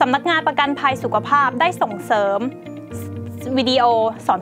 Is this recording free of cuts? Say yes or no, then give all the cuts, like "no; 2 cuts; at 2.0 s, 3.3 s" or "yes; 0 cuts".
yes; 0 cuts